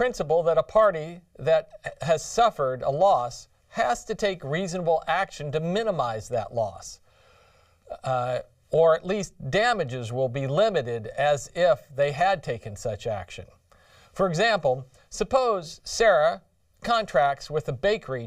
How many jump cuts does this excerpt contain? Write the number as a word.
one